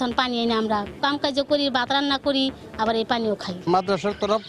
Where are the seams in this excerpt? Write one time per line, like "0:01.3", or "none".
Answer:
0:00.9
0:03.5